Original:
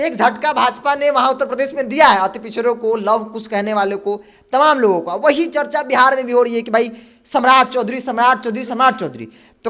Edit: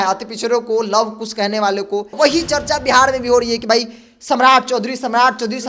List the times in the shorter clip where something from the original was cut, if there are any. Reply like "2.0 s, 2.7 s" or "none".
2.1 s